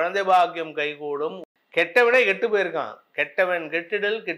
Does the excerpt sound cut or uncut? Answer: cut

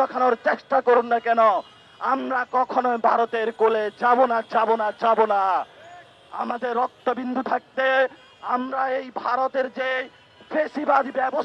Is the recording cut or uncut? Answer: uncut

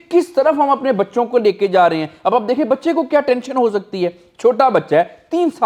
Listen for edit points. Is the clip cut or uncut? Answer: uncut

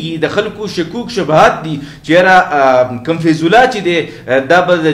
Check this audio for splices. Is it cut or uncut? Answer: uncut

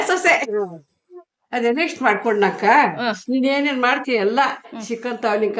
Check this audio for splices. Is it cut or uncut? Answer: uncut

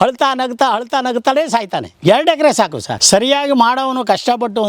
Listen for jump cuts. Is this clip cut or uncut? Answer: cut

